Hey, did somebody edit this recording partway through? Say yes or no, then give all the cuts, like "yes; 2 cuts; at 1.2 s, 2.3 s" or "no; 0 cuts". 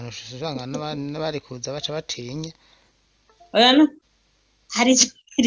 yes; 1 cut; at 4.0 s